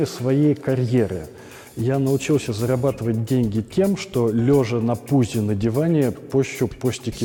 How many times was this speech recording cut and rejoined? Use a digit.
0